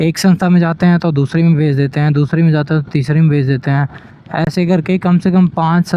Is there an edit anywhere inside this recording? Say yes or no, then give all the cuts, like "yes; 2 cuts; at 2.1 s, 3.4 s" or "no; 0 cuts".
no; 0 cuts